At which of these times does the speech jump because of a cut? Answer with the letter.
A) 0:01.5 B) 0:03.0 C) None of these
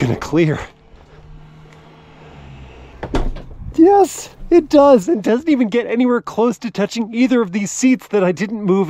B